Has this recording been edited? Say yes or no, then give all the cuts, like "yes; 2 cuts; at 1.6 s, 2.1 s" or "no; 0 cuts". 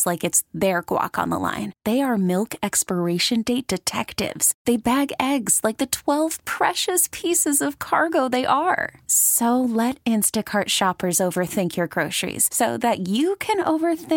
no; 0 cuts